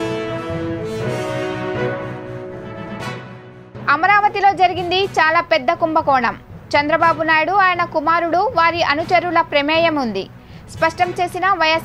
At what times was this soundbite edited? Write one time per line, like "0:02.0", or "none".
0:03.8